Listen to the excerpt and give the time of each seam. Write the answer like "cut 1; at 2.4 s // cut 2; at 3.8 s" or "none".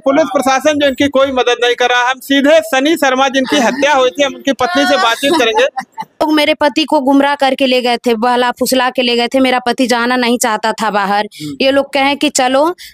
cut 1; at 6.2 s